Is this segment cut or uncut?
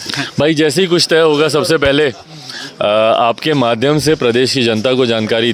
uncut